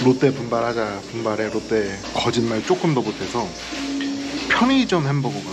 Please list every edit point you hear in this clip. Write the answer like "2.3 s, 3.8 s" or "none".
none